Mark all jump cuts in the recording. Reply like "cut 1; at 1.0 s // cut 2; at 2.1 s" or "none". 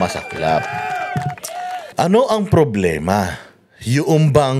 cut 1; at 1.8 s

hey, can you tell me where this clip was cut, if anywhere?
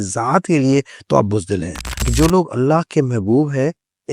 cut 1; at 2.0 s

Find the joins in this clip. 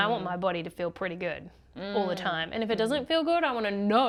none

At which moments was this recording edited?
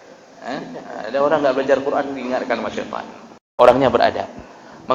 cut 1; at 3.4 s

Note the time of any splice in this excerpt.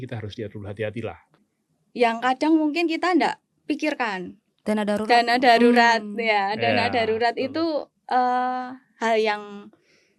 cut 1; at 1.3 s

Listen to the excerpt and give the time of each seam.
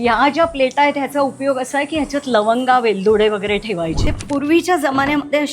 cut 1; at 4.1 s

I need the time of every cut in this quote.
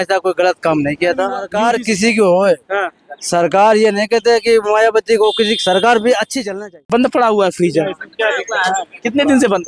cut 1; at 1.4 s // cut 2; at 6.8 s

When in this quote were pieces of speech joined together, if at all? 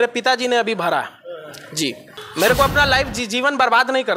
cut 1; at 2.1 s

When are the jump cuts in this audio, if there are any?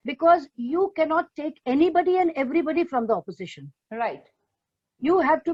none

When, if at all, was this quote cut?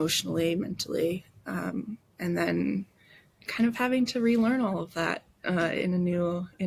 none

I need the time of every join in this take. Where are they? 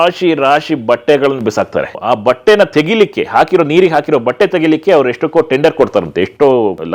none

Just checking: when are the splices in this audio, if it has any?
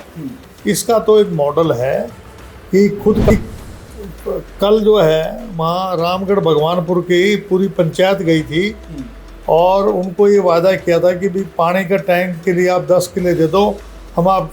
cut 1; at 3.3 s

